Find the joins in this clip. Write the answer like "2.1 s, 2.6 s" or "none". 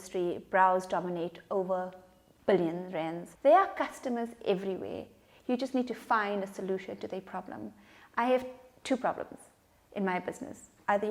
3.2 s